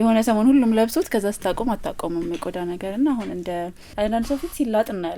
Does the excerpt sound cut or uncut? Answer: cut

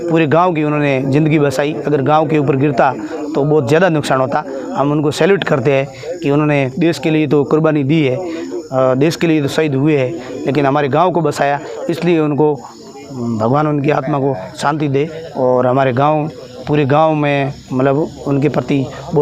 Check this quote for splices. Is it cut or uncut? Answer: uncut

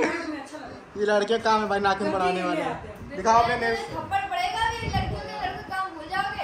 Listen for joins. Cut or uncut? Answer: uncut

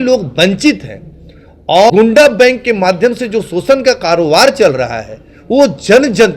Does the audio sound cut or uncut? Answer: cut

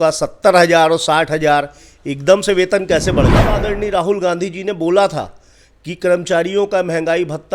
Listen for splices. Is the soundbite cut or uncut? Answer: cut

